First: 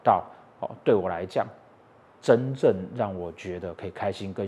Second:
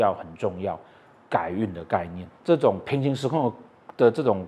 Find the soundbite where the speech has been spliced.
second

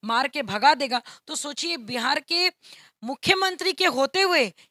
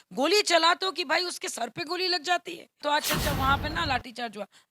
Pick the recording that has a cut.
second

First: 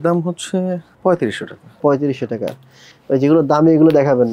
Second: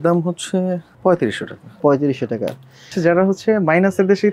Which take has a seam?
second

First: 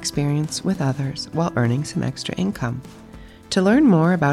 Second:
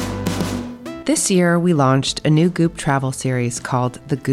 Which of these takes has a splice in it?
second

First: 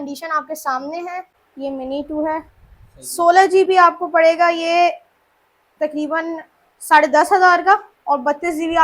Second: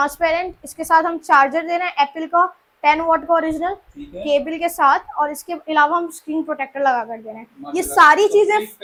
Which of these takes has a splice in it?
first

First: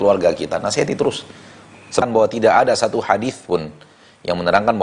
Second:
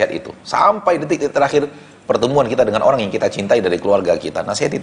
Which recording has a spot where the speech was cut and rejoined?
first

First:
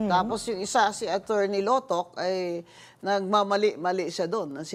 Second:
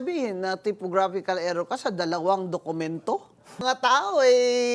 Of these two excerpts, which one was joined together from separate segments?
second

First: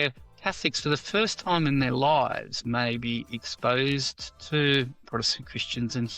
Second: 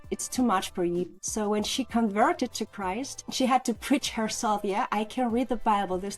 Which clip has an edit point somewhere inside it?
second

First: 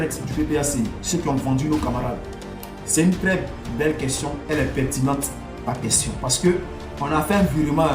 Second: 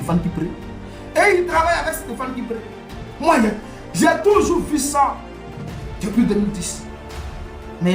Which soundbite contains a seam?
first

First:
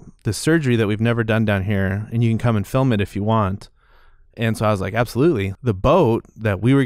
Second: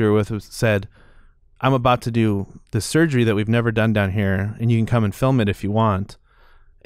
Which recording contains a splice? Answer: first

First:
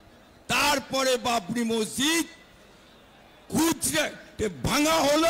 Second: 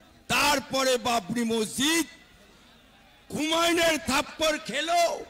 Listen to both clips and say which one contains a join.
second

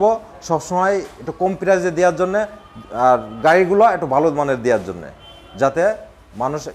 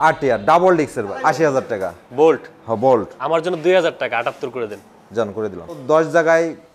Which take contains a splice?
second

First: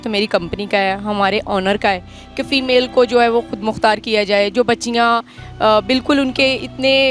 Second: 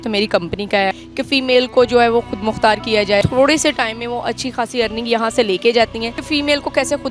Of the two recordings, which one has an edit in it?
second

